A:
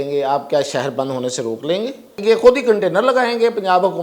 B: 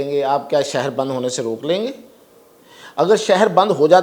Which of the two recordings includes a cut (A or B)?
A